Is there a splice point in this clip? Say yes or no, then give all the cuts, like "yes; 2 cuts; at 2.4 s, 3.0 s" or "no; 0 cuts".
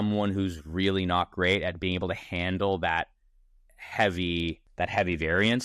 yes; 2 cuts; at 3.3 s, 4.6 s